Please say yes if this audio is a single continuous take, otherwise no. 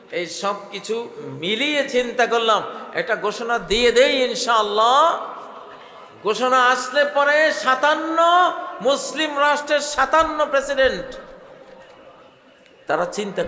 yes